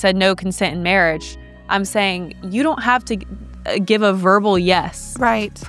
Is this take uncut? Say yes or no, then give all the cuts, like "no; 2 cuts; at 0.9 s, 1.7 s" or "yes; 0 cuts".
yes; 0 cuts